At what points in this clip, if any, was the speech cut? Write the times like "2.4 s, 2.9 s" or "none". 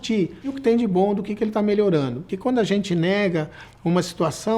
2.3 s